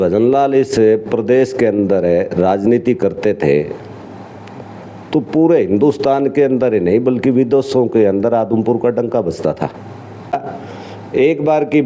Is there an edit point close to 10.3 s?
yes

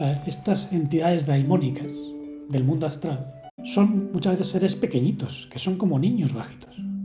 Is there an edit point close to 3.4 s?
no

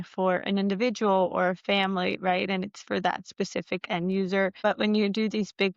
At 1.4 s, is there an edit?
no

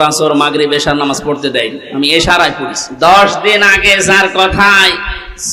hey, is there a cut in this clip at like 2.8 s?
yes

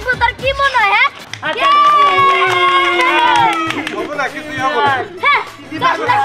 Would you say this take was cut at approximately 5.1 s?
no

